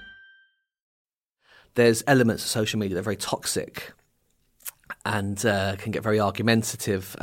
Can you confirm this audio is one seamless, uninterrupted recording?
no; 1 cut; at 1.1 s

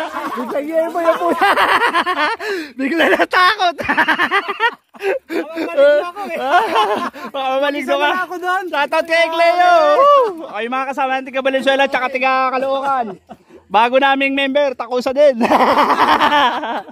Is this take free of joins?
yes; 0 cuts

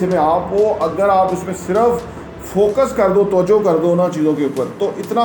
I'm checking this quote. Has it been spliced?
no; 0 cuts

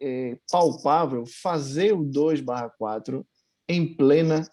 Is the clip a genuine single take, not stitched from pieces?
yes; 0 cuts

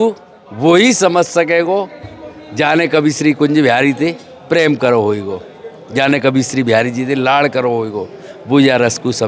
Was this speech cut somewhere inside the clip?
no; 0 cuts

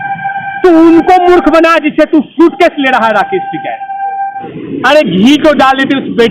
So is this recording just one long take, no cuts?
no; 1 cut; at 4.5 s

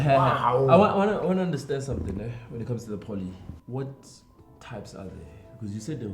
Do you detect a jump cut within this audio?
yes; 1 cut; at 3.5 s

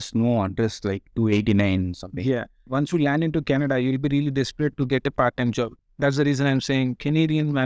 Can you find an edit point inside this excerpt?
yes; 2 cuts; at 2.7 s, 5.8 s

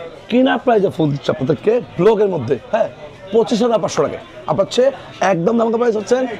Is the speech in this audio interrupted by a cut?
no; 0 cuts

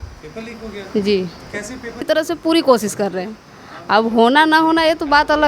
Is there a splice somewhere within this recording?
yes; 1 cut; at 2.1 s

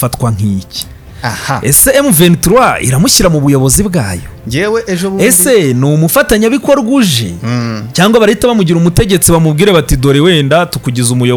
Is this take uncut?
yes; 0 cuts

